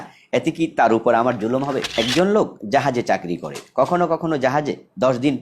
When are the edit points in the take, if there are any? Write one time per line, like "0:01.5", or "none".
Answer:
0:01.9